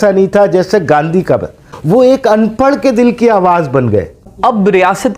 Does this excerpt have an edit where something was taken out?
yes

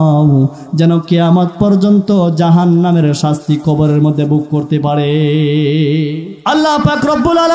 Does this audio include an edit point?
yes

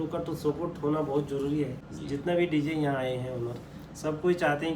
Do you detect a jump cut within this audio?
yes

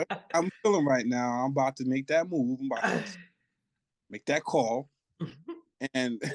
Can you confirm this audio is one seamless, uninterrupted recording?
yes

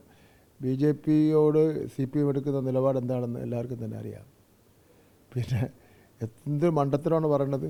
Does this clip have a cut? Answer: no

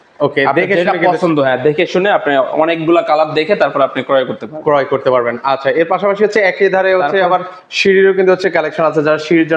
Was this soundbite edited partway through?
no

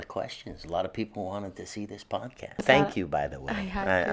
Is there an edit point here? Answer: no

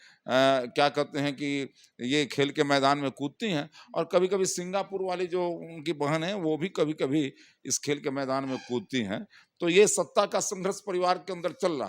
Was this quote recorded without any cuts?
yes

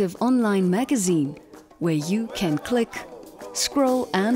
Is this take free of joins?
yes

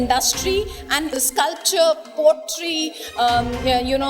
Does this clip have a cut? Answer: yes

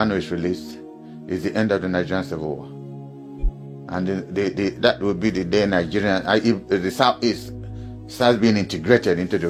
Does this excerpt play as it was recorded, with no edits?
yes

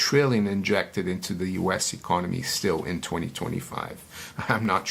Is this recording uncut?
yes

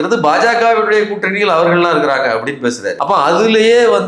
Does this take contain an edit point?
yes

